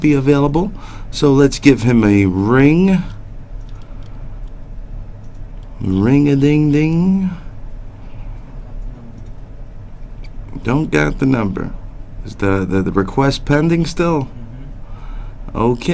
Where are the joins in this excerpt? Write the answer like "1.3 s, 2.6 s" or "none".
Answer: none